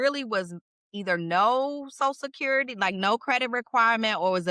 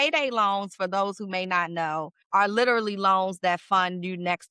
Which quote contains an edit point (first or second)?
second